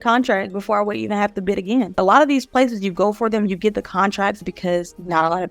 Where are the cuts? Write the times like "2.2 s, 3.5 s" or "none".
2.0 s, 4.4 s